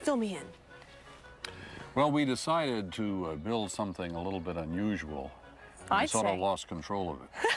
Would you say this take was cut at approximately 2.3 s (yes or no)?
yes